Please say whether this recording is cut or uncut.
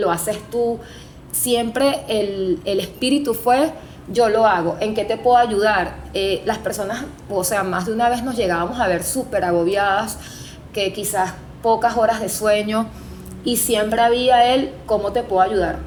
uncut